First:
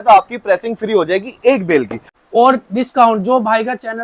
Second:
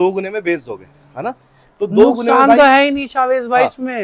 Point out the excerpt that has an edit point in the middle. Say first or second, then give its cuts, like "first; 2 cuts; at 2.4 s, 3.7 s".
first; 1 cut; at 2.0 s